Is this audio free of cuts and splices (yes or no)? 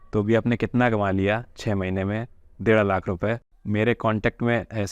no